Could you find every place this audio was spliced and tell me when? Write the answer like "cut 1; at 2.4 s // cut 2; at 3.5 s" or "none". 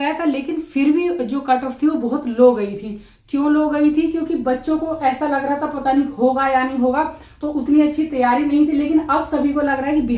none